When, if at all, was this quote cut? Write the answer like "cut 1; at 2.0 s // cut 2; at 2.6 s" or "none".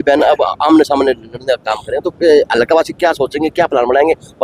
none